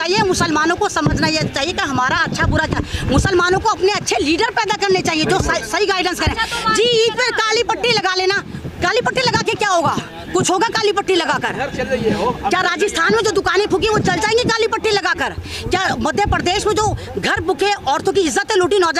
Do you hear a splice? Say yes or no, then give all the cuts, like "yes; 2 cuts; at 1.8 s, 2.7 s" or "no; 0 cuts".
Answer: no; 0 cuts